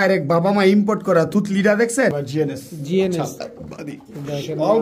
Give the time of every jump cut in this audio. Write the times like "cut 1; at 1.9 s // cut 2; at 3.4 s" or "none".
cut 1; at 2.1 s

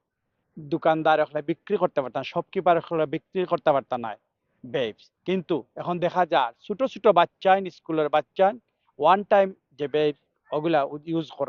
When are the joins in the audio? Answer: none

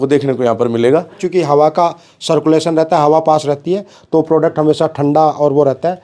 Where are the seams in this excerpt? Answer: cut 1; at 1.2 s

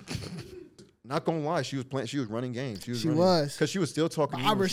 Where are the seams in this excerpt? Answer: cut 1; at 0.9 s

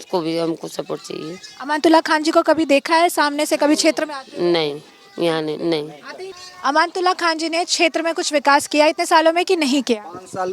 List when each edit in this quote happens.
none

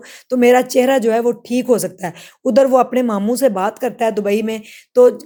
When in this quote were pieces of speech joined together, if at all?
none

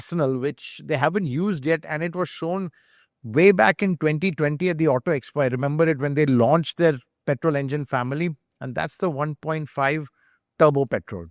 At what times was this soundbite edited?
none

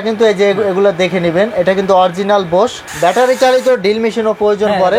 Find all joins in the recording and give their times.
cut 1; at 2.8 s

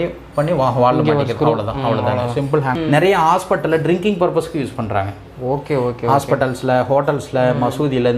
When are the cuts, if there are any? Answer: cut 1; at 2.8 s

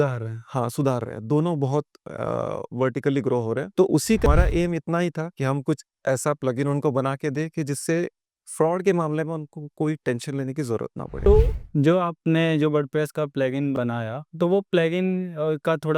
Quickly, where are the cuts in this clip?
cut 1; at 4.3 s // cut 2; at 11.2 s

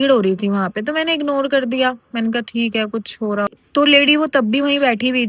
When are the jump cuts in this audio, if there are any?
cut 1; at 3.5 s

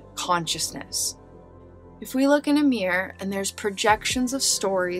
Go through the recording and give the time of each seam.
cut 1; at 1.5 s

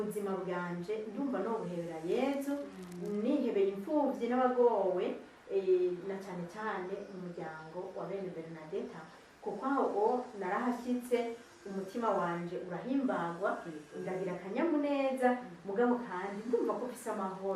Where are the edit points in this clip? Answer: none

